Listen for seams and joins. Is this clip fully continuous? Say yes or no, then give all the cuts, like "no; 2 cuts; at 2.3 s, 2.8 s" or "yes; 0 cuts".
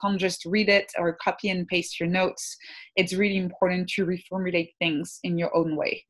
yes; 0 cuts